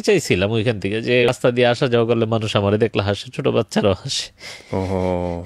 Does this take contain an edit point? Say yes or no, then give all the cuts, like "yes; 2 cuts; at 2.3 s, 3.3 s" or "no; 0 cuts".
yes; 1 cut; at 1.3 s